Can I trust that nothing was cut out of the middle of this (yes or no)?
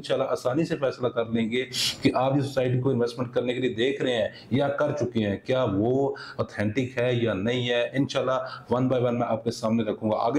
yes